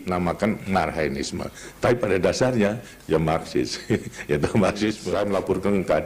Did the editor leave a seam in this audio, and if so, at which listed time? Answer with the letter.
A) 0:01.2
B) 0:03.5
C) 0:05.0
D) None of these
C